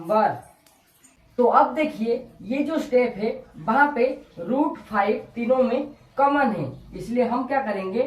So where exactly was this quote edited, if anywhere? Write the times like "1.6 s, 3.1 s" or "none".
1.2 s

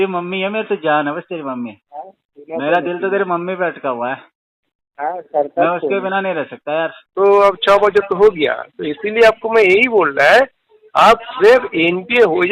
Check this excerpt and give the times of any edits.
7.0 s

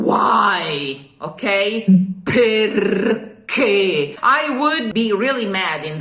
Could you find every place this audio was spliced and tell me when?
4.4 s

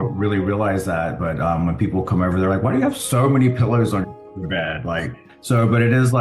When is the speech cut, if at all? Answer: 5.1 s

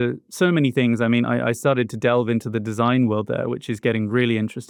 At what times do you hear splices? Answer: none

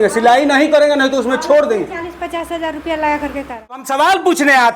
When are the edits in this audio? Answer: 3.8 s

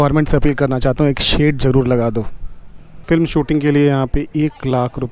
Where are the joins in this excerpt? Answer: 3.0 s

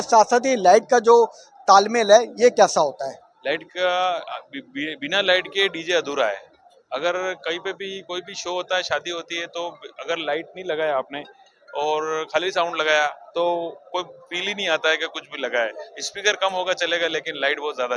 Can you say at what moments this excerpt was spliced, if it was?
none

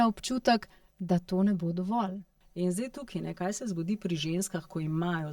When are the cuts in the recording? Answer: 2.3 s

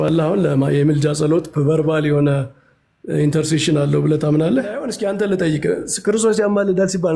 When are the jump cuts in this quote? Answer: 4.9 s

